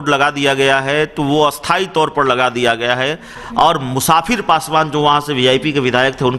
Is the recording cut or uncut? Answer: cut